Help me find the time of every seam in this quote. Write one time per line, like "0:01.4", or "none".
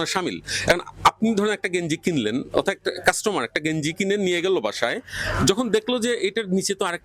none